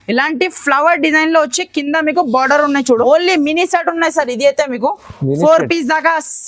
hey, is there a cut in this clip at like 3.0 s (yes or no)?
yes